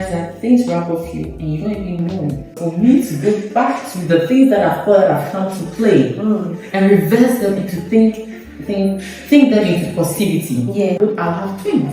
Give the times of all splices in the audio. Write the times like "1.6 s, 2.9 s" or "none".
2.6 s, 11.0 s